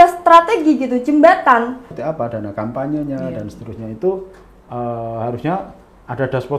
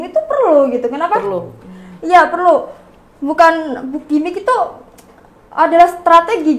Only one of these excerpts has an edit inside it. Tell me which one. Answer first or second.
first